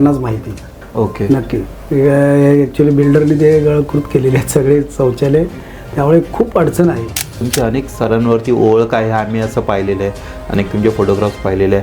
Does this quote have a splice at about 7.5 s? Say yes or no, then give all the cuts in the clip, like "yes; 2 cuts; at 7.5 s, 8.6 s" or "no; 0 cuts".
yes; 1 cut; at 7.5 s